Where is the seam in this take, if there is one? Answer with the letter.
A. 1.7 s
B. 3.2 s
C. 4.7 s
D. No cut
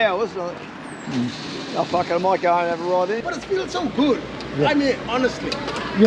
B